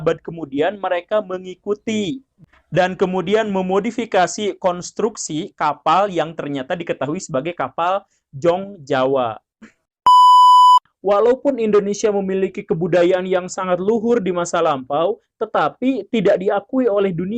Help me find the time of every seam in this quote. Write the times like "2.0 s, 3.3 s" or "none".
9.9 s, 10.8 s